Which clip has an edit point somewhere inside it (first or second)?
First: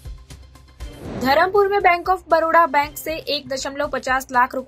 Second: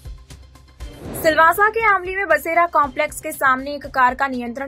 first